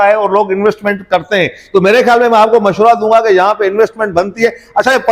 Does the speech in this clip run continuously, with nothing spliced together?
yes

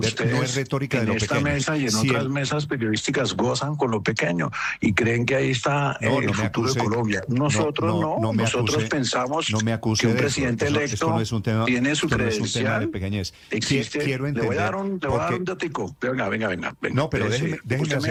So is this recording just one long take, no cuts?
yes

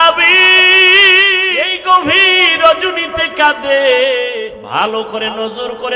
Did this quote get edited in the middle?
yes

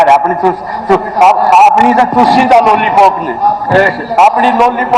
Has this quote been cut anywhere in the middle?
no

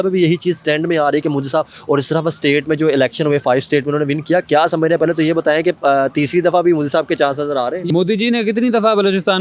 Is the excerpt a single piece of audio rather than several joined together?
no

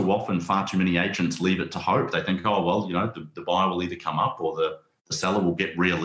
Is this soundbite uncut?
yes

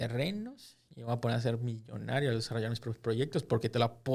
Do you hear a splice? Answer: no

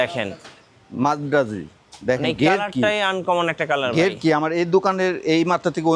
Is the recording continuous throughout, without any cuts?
yes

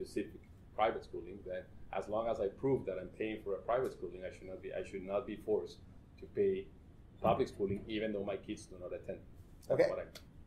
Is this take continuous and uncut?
yes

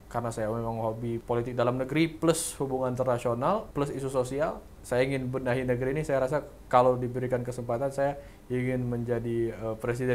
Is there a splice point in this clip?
yes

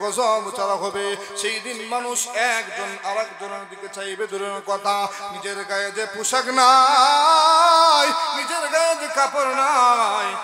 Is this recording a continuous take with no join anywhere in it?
yes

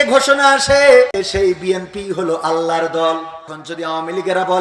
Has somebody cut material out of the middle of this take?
yes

